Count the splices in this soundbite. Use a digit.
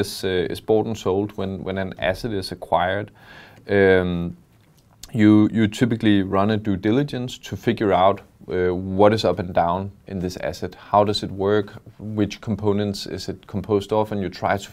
0